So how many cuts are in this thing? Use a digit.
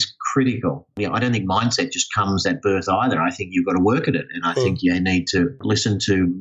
2